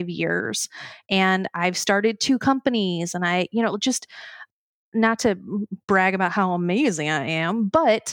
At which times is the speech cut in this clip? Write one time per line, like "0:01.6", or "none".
none